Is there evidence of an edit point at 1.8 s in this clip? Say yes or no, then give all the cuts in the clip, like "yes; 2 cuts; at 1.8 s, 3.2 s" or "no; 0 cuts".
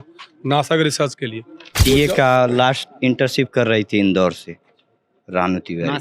yes; 1 cut; at 1.8 s